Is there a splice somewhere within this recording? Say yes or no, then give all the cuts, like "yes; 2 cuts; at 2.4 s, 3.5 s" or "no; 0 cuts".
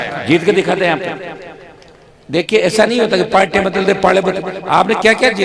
no; 0 cuts